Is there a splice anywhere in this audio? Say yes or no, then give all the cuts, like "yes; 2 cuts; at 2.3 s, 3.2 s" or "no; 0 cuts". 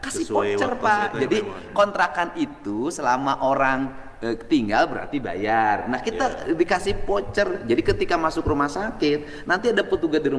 no; 0 cuts